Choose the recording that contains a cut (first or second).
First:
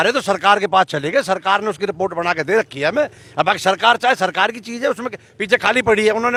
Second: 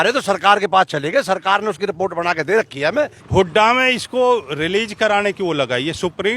second